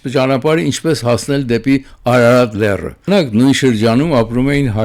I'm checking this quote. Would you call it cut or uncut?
cut